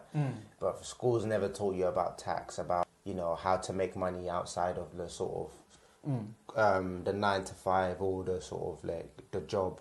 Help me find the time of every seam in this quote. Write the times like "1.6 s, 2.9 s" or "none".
2.8 s